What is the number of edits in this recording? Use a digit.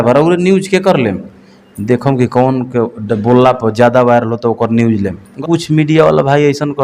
1